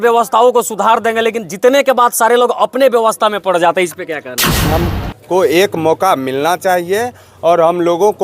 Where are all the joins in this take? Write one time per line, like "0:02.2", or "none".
0:04.7